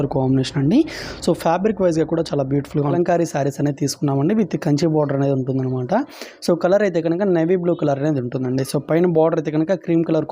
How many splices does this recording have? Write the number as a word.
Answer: one